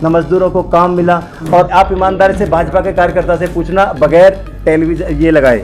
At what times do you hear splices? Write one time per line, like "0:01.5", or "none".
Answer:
0:01.7